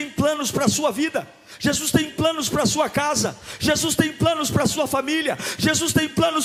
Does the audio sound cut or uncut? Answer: uncut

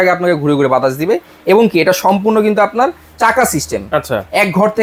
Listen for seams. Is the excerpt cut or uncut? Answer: uncut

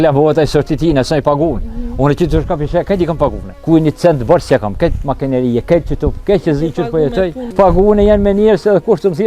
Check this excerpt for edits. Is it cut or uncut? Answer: cut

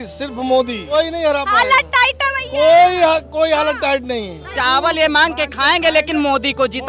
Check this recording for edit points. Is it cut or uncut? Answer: cut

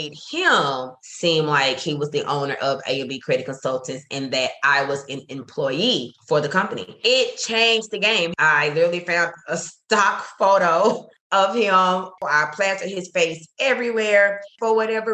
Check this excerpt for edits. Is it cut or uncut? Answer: cut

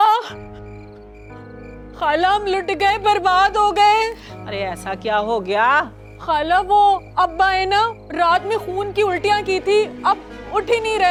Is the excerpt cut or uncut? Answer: uncut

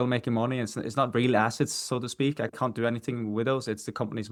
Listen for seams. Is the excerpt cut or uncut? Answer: uncut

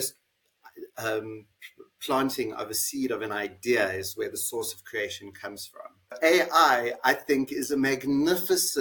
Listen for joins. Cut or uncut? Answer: cut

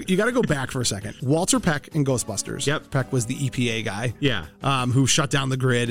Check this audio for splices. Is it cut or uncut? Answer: cut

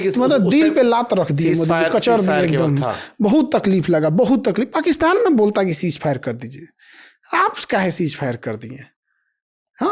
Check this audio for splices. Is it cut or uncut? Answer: uncut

